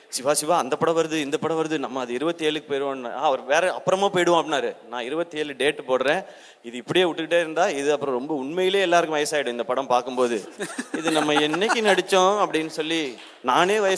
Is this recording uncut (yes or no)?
yes